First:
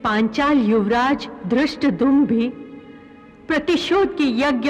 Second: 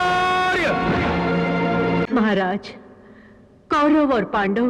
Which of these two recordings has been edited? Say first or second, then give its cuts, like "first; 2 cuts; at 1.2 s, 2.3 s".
second; 1 cut; at 2.0 s